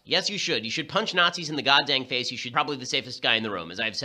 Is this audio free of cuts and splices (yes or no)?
yes